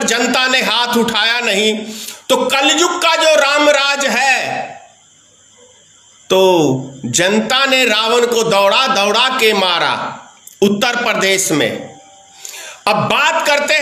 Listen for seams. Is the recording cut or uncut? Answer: uncut